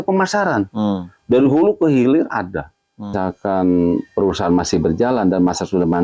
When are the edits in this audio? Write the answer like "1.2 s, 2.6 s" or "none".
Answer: 3.1 s